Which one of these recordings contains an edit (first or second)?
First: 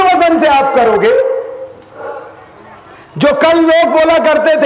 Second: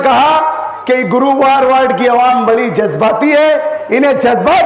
first